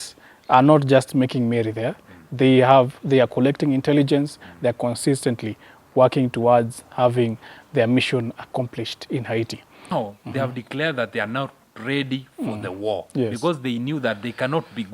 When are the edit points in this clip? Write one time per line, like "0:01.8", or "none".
0:09.9